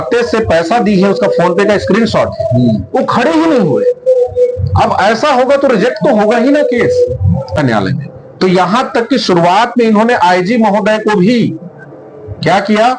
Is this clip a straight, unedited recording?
no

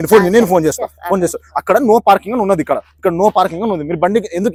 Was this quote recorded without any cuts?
yes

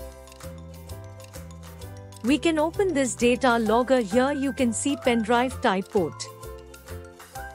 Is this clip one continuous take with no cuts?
no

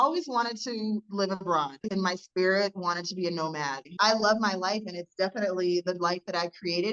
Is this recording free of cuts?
no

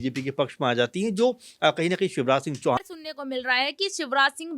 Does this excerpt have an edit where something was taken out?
yes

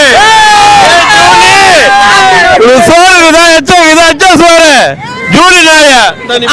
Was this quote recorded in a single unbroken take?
yes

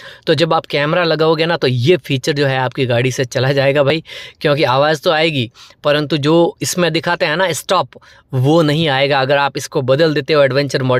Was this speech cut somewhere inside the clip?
no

